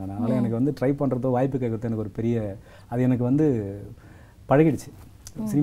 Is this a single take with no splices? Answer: yes; 0 cuts

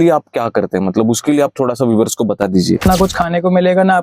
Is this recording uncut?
no; 1 cut; at 2.8 s

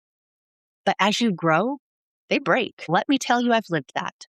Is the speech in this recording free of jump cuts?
no; 1 cut; at 2.9 s

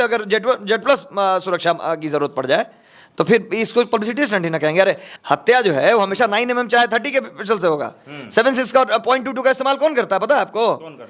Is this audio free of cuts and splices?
no; 1 cut; at 5.1 s

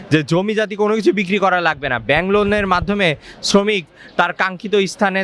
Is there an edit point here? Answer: no; 0 cuts

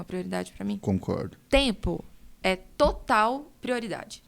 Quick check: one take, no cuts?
no; 1 cut; at 1.4 s

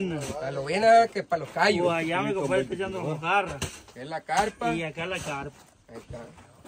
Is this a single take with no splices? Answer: yes; 0 cuts

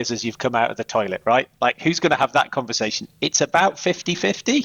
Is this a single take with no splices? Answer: yes; 0 cuts

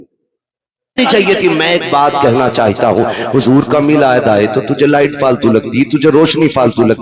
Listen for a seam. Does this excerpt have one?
yes; 1 cut; at 1.0 s

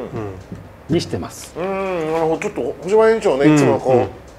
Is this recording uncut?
yes; 0 cuts

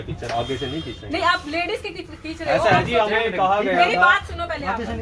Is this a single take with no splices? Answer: yes; 0 cuts

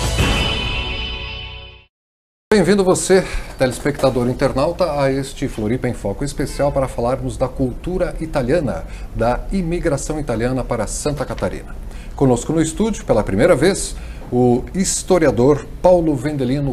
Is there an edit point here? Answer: no; 0 cuts

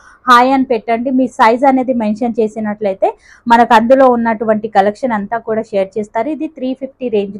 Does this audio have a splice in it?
no; 0 cuts

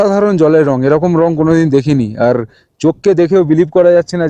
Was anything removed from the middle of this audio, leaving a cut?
no; 0 cuts

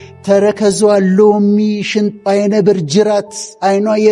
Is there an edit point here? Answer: no; 0 cuts

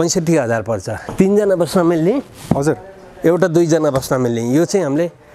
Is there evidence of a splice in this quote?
yes; 1 cut; at 1.0 s

